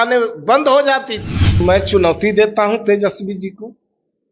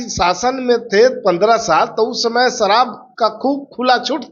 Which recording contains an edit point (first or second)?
first